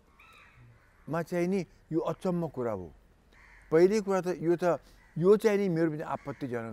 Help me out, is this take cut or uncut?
uncut